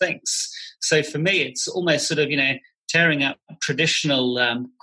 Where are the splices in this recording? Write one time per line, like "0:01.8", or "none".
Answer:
none